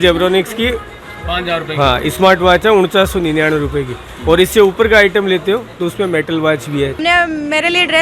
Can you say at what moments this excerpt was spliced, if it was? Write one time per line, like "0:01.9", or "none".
0:07.0